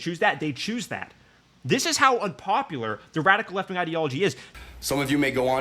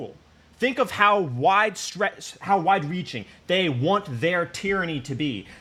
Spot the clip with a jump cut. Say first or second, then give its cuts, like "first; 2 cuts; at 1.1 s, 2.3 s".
first; 1 cut; at 4.6 s